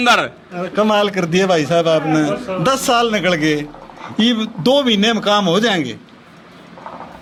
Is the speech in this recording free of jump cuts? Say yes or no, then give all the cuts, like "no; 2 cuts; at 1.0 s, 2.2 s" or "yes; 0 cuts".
yes; 0 cuts